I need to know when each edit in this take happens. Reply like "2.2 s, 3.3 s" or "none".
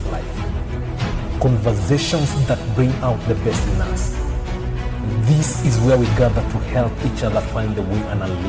none